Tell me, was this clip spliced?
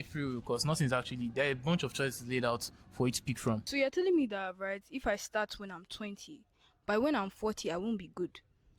yes; 1 cut; at 3.7 s

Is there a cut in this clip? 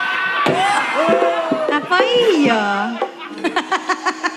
yes; 1 cut; at 3.3 s

